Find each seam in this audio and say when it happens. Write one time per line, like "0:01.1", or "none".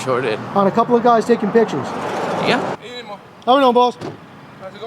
0:02.7

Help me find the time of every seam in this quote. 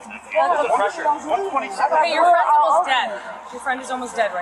none

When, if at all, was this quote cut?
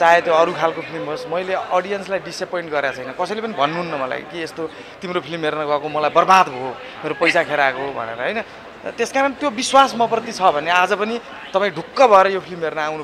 none

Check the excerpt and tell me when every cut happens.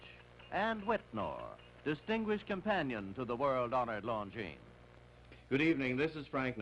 none

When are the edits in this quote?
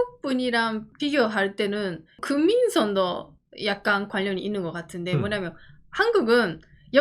0:00.9
0:02.2

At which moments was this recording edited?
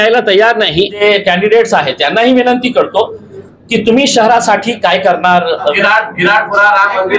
0:01.0
0:05.7

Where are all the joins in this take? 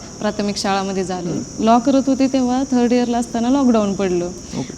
0:01.3

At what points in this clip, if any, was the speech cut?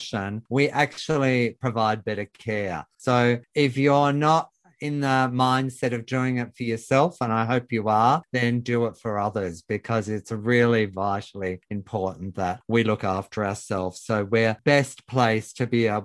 0:02.9

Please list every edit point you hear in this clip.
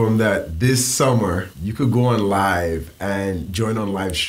0:01.6

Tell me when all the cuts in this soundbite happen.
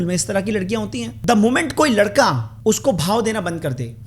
0:01.1
0:02.5

